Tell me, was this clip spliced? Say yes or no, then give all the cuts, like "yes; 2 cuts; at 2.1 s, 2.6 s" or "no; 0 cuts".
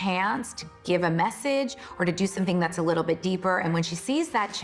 no; 0 cuts